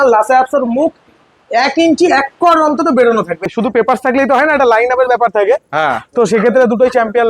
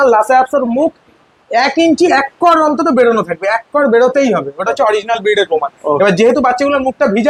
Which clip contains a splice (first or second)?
first